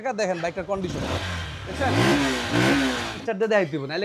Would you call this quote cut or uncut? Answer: cut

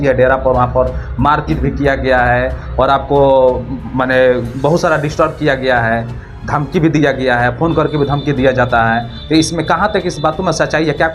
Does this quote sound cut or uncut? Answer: uncut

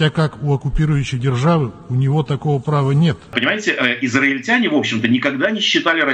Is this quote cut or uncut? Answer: cut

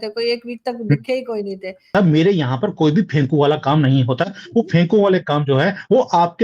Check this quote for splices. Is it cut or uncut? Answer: cut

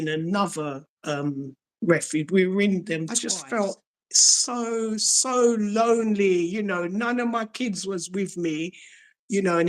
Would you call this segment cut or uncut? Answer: cut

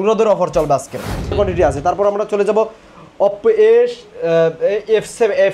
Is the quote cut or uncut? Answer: cut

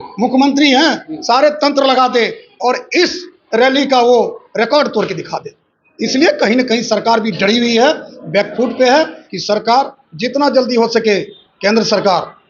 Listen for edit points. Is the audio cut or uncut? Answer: cut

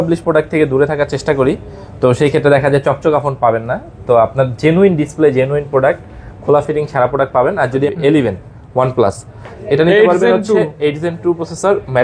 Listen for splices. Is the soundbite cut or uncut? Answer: cut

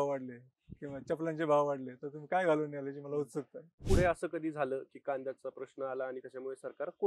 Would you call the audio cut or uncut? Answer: cut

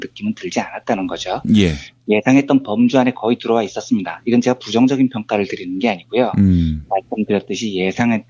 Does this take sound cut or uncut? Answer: uncut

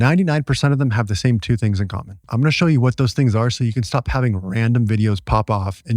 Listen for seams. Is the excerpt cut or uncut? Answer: cut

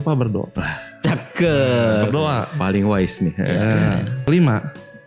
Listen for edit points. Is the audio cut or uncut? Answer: uncut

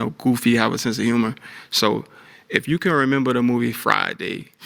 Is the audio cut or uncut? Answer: uncut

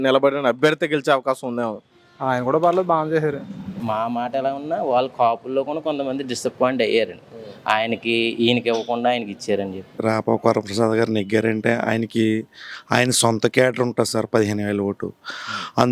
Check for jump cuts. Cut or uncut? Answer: cut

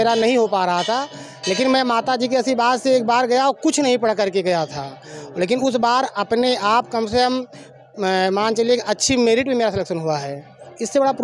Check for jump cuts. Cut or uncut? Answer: uncut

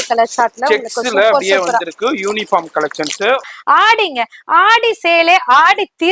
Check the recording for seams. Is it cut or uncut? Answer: cut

